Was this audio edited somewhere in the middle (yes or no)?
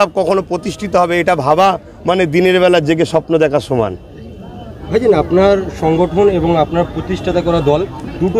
no